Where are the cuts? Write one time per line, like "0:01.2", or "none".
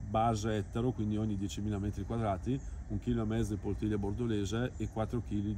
none